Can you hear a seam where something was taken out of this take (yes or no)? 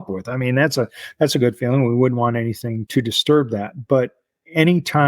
yes